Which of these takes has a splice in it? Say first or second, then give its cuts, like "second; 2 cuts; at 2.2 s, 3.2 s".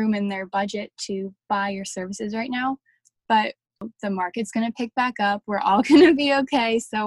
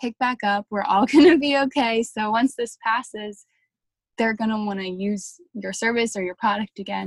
first; 1 cut; at 3.8 s